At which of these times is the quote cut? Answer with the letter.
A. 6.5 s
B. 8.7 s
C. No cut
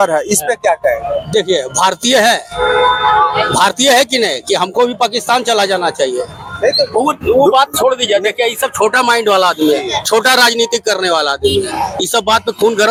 C